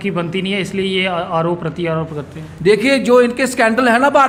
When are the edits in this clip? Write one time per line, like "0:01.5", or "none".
none